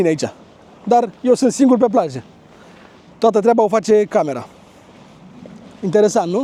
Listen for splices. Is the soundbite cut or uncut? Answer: uncut